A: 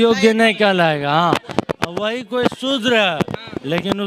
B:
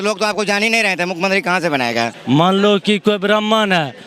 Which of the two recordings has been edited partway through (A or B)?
B